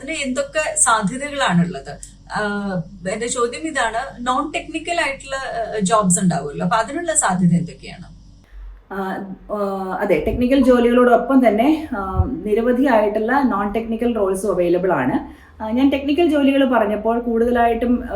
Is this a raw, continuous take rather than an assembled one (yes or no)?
yes